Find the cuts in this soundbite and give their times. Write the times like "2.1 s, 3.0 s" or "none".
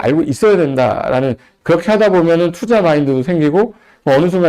1.5 s